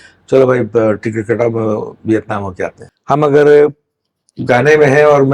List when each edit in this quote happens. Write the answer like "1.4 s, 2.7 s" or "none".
2.9 s